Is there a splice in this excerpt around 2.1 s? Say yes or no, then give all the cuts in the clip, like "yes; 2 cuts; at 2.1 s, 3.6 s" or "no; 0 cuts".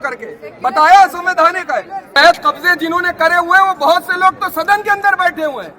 yes; 1 cut; at 2.1 s